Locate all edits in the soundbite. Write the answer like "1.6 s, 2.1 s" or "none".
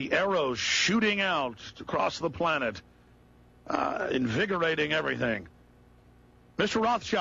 none